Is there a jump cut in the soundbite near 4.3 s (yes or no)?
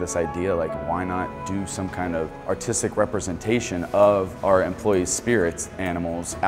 yes